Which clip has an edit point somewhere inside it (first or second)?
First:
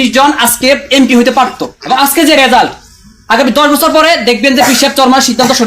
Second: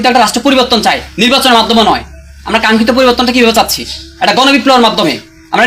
first